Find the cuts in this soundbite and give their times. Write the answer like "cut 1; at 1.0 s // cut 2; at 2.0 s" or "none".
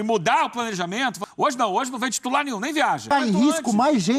cut 1; at 1.2 s // cut 2; at 3.0 s